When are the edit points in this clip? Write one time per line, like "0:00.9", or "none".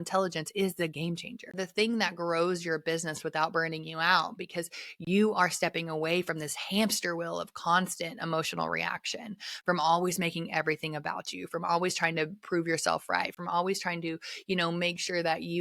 0:01.5